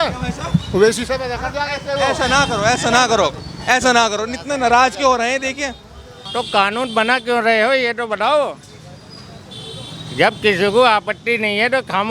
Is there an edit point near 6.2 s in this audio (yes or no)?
yes